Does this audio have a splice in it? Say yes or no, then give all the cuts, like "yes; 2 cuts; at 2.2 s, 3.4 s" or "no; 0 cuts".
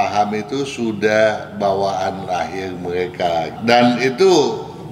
yes; 1 cut; at 3.5 s